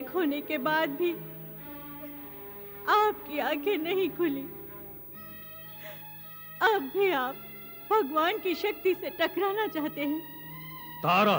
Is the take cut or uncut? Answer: uncut